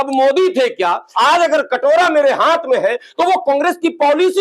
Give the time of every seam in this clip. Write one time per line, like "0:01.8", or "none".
0:01.1